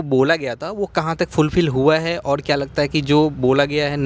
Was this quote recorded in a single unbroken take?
yes; 0 cuts

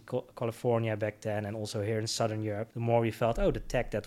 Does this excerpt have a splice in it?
yes; 1 cut; at 2.7 s

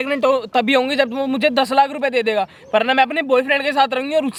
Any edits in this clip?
no; 0 cuts

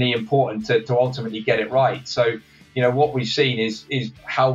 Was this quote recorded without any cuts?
yes; 0 cuts

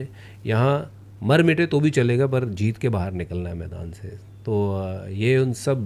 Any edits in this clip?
no; 0 cuts

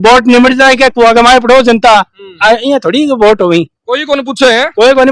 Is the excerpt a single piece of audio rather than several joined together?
yes; 0 cuts

